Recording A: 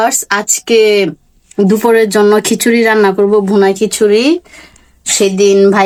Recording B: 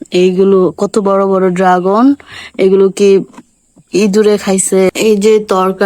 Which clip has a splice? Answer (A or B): B